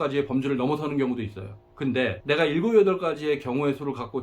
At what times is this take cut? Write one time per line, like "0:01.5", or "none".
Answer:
none